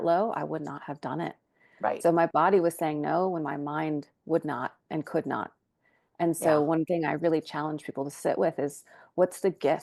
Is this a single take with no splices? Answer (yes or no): yes